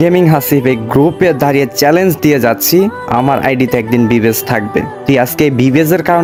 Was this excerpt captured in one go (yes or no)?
yes